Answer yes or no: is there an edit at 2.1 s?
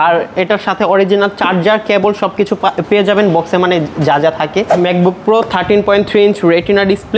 no